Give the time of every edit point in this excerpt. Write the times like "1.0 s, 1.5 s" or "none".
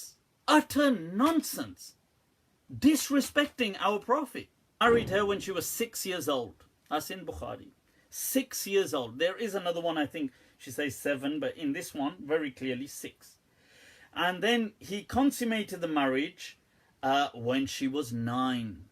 4.8 s